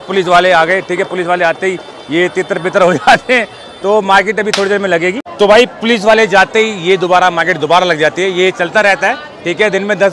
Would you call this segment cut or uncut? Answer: cut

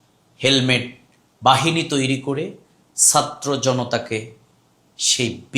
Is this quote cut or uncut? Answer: uncut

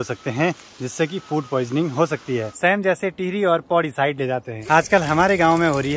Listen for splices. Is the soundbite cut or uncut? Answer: cut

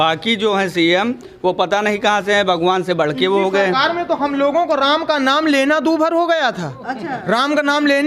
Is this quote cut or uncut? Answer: uncut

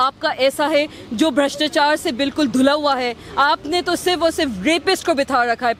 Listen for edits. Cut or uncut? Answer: uncut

